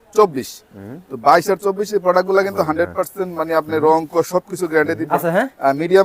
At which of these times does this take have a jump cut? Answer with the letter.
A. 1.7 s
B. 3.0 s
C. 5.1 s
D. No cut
C